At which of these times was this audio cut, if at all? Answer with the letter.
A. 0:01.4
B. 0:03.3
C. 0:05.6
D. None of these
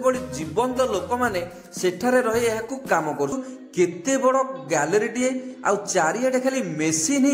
B